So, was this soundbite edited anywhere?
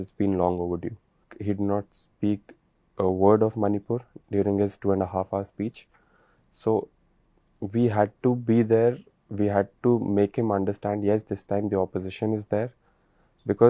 yes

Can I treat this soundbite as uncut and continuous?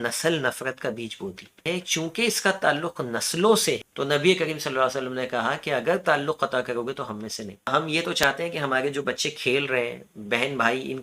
no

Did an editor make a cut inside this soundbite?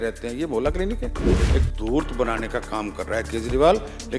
yes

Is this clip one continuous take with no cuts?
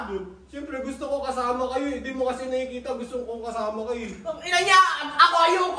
yes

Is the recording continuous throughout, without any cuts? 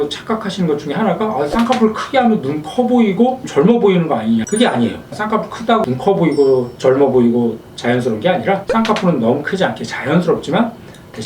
no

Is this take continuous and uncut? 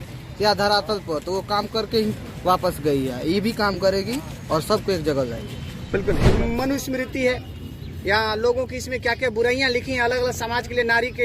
no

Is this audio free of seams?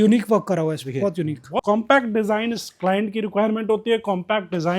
no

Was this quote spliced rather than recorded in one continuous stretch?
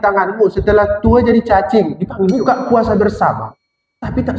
yes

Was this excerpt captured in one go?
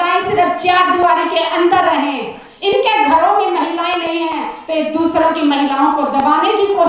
yes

